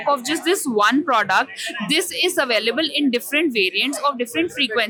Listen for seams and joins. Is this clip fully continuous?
yes; 0 cuts

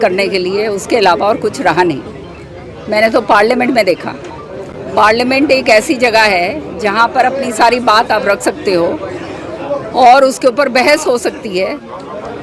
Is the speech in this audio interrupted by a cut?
no; 0 cuts

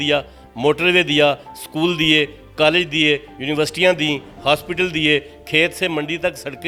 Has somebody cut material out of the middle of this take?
no; 0 cuts

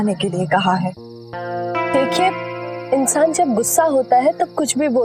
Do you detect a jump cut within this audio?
no; 0 cuts

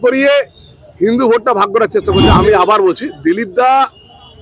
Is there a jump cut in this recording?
yes; 1 cut; at 2.3 s

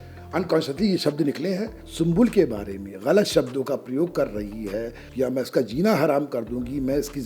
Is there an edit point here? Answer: yes; 2 cuts; at 1.8 s, 5.0 s

